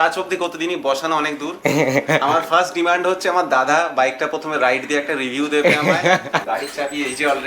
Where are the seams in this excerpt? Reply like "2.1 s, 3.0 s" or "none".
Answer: 6.4 s

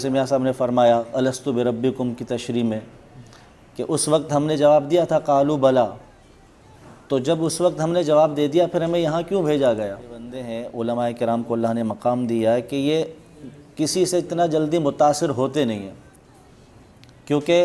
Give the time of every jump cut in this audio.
10.4 s

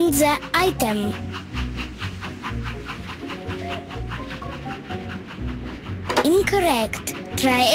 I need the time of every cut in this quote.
0.9 s

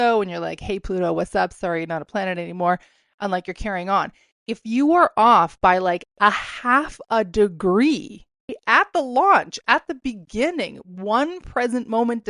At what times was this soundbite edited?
8.6 s

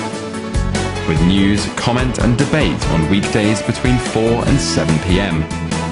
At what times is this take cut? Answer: none

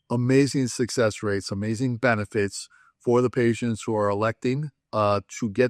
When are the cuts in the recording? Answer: none

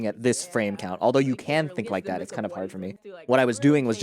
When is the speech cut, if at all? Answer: 3.1 s

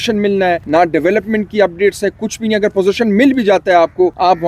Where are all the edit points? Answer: none

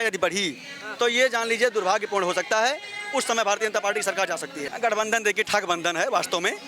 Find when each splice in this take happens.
4.6 s

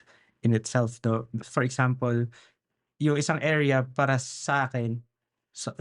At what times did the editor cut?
1.3 s

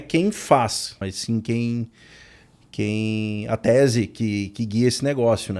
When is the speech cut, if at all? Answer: 1.0 s

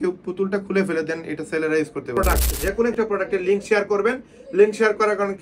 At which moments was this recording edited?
2.2 s

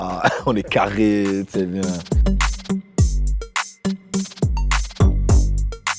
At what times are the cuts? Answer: none

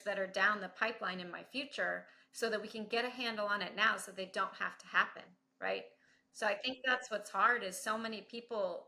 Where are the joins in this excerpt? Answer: none

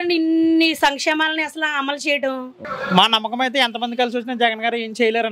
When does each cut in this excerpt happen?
2.6 s

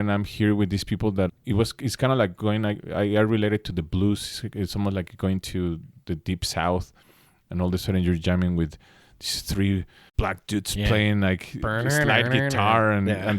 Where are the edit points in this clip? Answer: 1.4 s, 10.0 s

